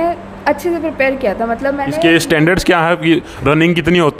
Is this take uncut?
yes; 0 cuts

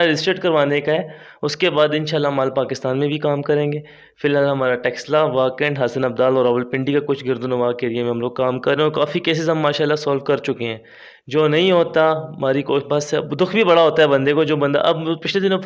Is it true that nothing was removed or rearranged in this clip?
yes; 0 cuts

